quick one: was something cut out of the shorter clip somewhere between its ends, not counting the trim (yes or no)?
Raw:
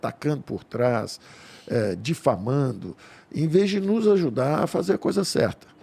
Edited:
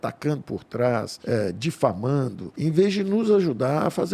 yes